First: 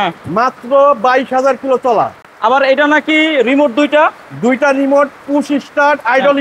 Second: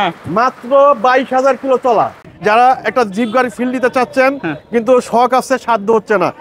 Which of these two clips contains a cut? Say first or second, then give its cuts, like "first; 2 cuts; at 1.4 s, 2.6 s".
second; 1 cut; at 2.2 s